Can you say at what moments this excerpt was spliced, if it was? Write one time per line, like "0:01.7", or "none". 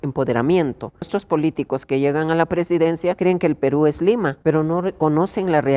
0:01.1
0:03.2
0:04.4